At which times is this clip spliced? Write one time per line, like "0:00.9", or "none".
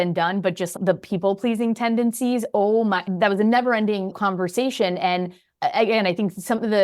0:03.0